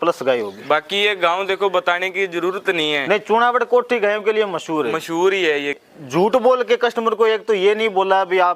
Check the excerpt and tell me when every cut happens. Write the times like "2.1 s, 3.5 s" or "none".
5.8 s